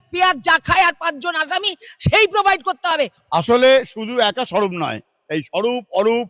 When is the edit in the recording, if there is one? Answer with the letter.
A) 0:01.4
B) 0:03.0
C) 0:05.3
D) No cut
B